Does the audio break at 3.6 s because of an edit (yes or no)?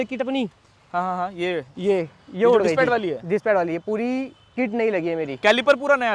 no